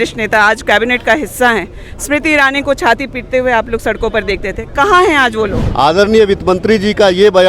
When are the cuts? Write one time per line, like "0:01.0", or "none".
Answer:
0:05.6